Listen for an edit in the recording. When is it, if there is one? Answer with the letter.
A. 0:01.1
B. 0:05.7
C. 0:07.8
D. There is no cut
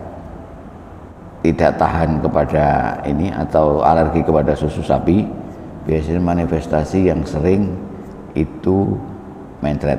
A